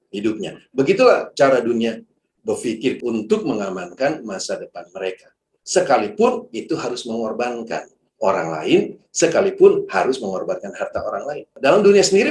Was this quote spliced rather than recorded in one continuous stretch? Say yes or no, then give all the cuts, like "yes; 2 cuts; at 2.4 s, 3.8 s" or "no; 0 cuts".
yes; 1 cut; at 3.0 s